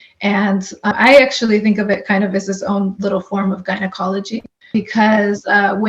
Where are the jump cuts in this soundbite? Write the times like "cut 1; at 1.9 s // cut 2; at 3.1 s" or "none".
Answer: cut 1; at 0.9 s // cut 2; at 4.7 s